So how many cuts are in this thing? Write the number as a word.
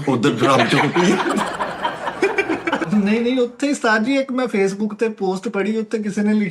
one